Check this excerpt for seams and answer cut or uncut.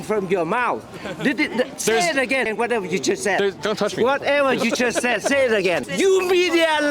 cut